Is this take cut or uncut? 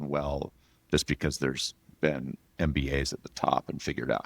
uncut